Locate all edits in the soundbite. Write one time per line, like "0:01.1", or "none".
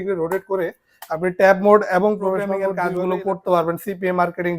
0:02.7